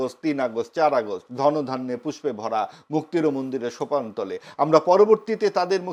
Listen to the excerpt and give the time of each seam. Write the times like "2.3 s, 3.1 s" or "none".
none